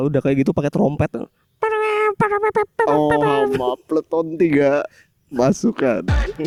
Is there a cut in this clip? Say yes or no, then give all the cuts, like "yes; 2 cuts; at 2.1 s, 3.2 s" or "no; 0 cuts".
no; 0 cuts